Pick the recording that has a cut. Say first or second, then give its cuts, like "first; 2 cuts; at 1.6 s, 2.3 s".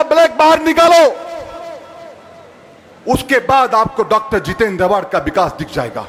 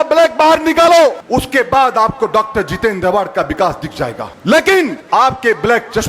second; 3 cuts; at 1.2 s, 4.3 s, 5.0 s